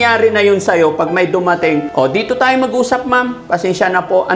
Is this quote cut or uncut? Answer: cut